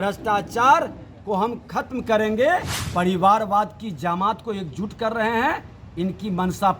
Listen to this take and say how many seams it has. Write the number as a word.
one